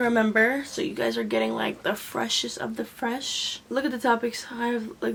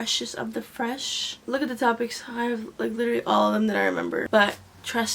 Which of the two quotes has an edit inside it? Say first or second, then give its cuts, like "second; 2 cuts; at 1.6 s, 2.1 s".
second; 1 cut; at 4.2 s